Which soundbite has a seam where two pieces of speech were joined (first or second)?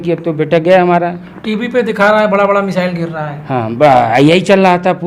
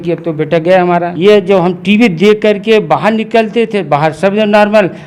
second